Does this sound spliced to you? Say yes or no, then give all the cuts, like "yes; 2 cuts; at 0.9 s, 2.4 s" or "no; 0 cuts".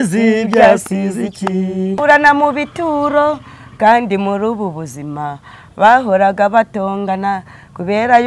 yes; 1 cut; at 2.0 s